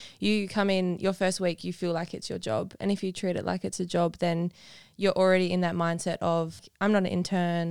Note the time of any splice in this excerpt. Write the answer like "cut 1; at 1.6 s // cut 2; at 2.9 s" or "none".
cut 1; at 6.6 s